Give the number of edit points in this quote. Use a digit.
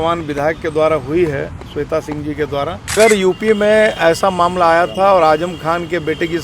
1